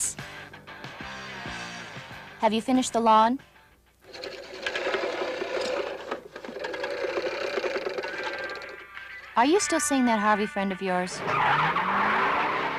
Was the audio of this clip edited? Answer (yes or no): no